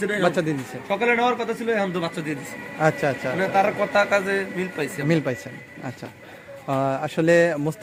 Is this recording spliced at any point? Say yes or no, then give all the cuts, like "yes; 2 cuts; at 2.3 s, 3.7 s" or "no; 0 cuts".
no; 0 cuts